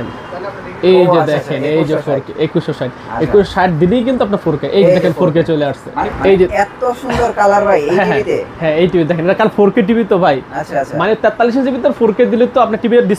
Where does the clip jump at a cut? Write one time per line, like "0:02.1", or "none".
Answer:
0:05.9